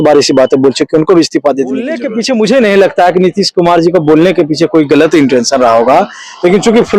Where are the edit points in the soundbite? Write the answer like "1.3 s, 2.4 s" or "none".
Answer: 2.1 s